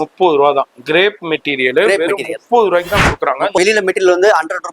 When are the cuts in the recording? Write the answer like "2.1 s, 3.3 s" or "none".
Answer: 3.5 s